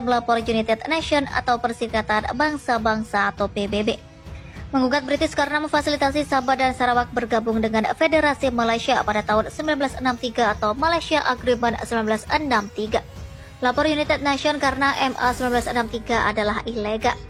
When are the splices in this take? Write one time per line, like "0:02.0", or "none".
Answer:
none